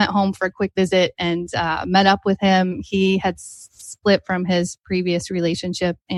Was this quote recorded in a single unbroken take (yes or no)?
yes